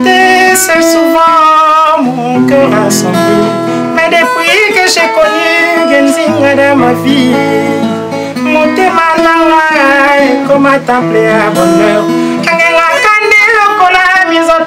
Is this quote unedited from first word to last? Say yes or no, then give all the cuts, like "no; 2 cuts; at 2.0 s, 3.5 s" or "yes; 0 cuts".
yes; 0 cuts